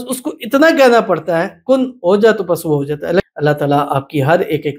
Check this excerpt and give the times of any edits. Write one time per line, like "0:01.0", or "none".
0:03.2